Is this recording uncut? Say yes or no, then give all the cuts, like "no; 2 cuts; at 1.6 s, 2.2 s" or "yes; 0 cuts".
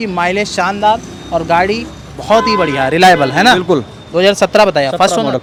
yes; 0 cuts